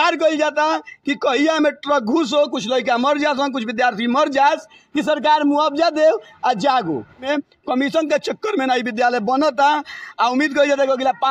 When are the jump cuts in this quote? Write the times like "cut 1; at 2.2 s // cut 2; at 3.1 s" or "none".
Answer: cut 1; at 7.3 s